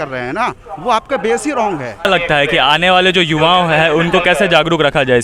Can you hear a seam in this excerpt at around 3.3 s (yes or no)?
no